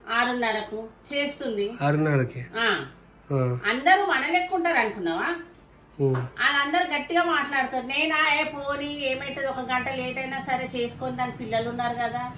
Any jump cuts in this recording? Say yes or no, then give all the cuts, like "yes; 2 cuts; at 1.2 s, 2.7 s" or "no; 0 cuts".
no; 0 cuts